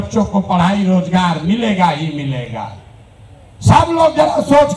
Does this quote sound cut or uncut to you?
uncut